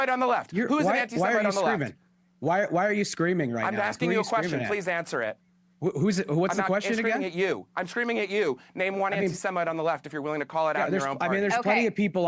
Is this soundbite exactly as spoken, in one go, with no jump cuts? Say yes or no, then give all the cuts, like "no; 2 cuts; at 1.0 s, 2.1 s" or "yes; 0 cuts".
no; 1 cut; at 2.0 s